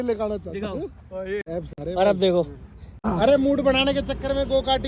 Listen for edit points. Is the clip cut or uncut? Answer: cut